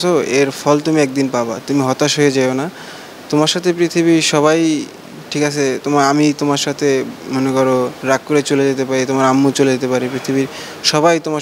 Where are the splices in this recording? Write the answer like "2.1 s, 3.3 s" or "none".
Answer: none